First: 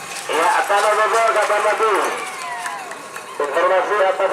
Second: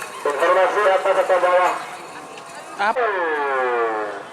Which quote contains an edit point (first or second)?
second